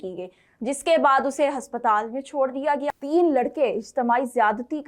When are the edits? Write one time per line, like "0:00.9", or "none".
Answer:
0:02.9